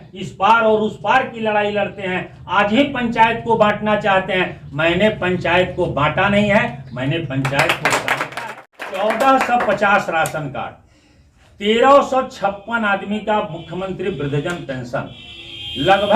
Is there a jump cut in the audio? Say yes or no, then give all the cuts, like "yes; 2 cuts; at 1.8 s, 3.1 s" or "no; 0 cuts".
yes; 1 cut; at 8.5 s